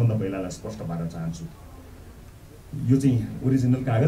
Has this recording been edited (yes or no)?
no